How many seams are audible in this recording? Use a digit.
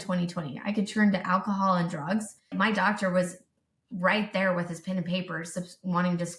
1